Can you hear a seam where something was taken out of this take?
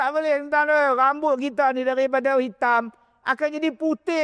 no; 0 cuts

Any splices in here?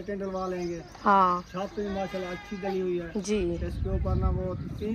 no; 0 cuts

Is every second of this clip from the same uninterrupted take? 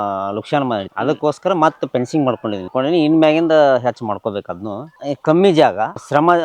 no; 2 cuts; at 2.7 s, 4.9 s

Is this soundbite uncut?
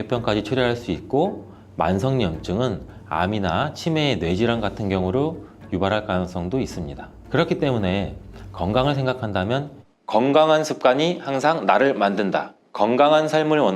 no; 1 cut; at 9.7 s

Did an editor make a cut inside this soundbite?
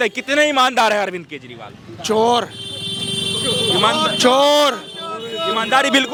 no; 0 cuts

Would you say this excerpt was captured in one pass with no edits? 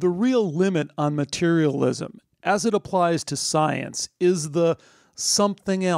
yes; 0 cuts

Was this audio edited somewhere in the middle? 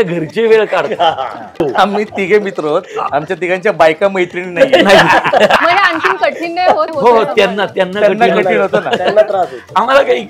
yes; 3 cuts; at 1.5 s, 5.6 s, 6.9 s

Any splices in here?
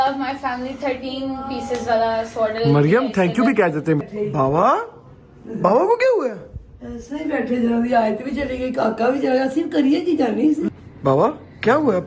yes; 2 cuts; at 4.0 s, 10.6 s

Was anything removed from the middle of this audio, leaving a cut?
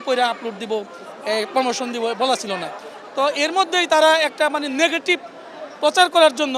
no; 0 cuts

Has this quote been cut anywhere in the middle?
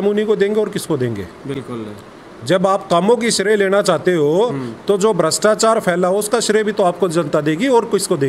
no; 0 cuts

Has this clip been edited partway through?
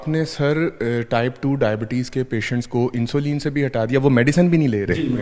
no; 0 cuts

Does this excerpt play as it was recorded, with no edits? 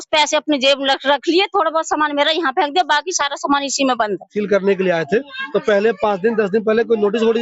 no; 1 cut; at 4.3 s

